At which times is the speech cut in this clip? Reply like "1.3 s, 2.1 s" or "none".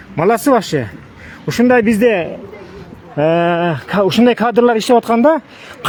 none